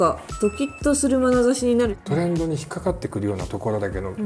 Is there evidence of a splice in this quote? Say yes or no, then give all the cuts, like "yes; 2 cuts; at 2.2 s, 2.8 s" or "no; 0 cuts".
yes; 1 cut; at 2.0 s